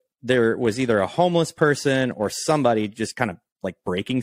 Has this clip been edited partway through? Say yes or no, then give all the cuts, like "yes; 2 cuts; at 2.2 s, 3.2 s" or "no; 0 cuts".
no; 0 cuts